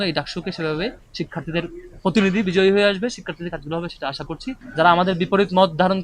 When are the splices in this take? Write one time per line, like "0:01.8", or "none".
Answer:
0:04.6

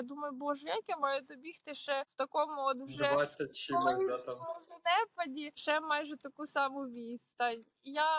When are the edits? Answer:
0:02.1
0:05.6

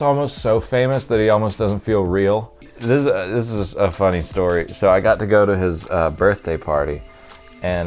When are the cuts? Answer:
0:02.7

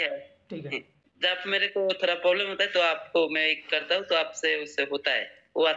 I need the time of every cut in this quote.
0:00.9

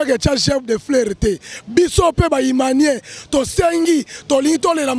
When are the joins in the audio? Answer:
none

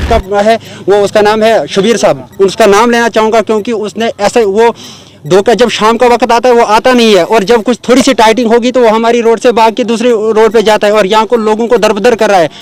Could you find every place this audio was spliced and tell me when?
none

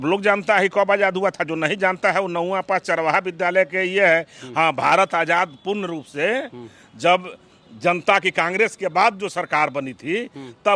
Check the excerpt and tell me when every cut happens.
none

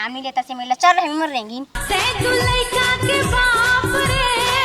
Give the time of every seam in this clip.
0:01.7

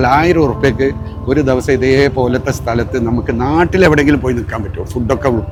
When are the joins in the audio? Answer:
none

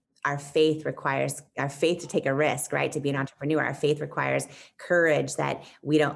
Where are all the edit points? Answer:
none

